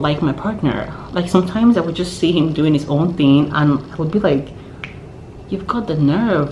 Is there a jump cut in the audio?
no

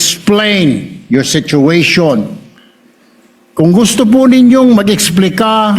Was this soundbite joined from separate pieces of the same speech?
no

